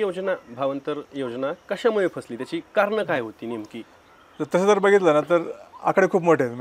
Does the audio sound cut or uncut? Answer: uncut